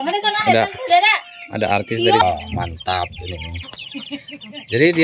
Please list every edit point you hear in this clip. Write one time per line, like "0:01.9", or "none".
0:02.2